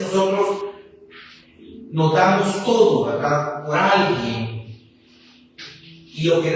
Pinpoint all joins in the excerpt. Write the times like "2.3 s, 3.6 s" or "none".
none